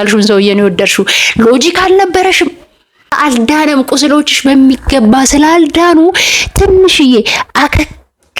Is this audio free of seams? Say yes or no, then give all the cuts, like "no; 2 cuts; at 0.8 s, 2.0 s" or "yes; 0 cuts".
no; 1 cut; at 3.2 s